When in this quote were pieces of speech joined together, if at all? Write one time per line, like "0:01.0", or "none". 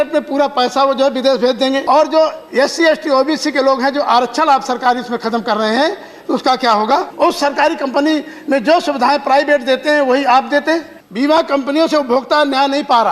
0:01.8
0:07.1
0:11.0